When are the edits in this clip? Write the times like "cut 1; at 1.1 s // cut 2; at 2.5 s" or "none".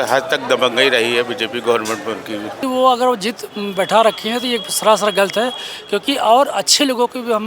cut 1; at 2.6 s